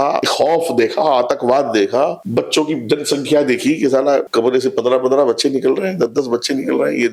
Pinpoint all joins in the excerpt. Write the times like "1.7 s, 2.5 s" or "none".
none